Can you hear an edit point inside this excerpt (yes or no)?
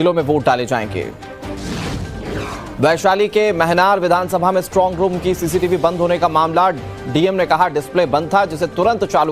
no